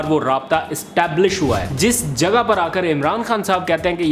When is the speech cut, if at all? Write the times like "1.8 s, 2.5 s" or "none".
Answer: 1.7 s